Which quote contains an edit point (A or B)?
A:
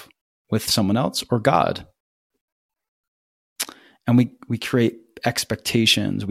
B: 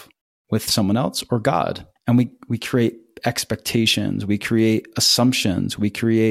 B